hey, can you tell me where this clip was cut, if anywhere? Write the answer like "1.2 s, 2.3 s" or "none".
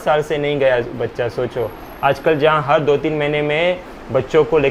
none